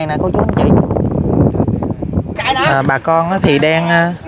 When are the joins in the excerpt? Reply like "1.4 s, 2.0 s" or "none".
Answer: 2.3 s